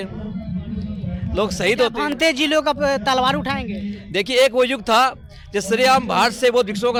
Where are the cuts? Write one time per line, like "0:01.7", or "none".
none